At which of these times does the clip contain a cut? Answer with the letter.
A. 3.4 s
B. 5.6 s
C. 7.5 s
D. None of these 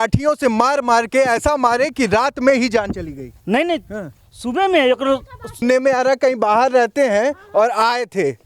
B